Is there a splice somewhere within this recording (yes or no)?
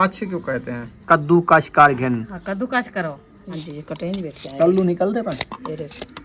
yes